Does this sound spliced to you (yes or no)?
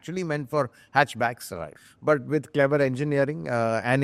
no